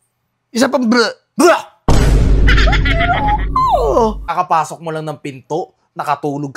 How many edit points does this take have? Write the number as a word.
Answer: one